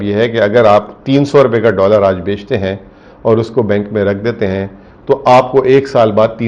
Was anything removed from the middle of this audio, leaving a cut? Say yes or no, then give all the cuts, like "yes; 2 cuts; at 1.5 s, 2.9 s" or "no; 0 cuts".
no; 0 cuts